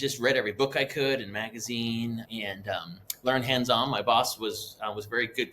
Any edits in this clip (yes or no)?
yes